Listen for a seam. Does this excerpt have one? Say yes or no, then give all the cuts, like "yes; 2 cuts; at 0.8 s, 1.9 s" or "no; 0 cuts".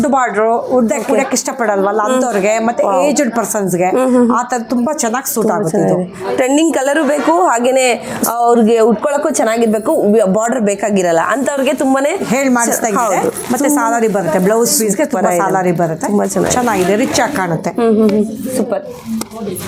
no; 0 cuts